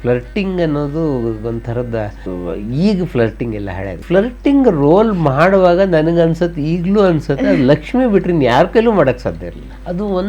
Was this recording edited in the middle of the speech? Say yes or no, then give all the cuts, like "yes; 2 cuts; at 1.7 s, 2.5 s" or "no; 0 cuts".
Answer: yes; 2 cuts; at 2.2 s, 4.0 s